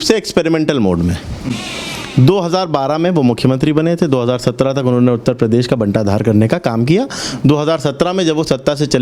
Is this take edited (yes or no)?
no